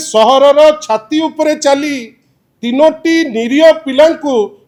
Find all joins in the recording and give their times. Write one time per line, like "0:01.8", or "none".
none

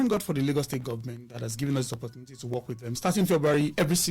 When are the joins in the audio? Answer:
0:03.0

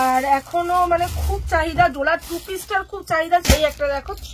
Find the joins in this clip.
0:03.4

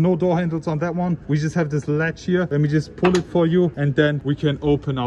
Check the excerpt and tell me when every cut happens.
0:01.2
0:02.5
0:03.9

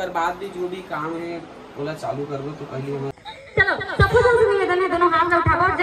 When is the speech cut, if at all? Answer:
0:03.2

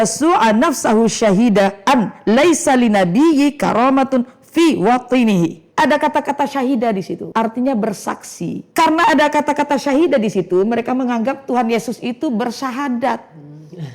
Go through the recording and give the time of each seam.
0:05.6
0:07.2
0:08.6

